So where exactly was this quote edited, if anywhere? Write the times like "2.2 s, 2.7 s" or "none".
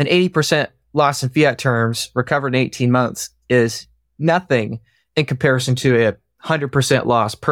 none